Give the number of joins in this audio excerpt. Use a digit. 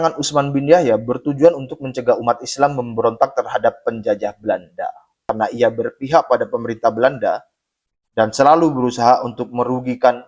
1